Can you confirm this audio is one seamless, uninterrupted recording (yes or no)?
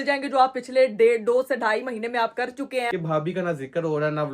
no